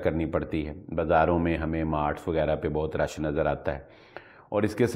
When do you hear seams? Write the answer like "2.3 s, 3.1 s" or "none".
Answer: none